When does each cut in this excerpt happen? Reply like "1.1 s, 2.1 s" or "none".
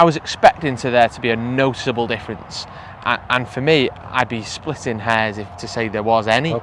none